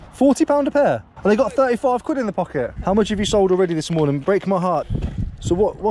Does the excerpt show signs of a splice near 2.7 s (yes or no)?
yes